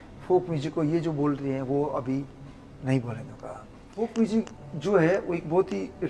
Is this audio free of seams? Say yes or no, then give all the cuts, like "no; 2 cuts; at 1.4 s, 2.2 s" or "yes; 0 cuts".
no; 1 cut; at 3.9 s